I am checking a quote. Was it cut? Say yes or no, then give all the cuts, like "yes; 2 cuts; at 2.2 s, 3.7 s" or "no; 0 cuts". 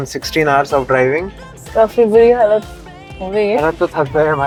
no; 0 cuts